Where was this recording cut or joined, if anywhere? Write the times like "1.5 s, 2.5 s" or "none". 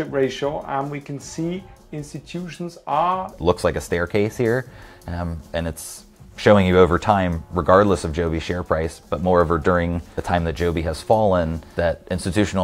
3.3 s, 10.1 s, 11.6 s